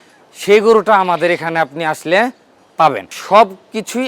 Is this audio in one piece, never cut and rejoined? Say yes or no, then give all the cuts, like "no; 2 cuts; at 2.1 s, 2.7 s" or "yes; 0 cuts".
no; 1 cut; at 3.2 s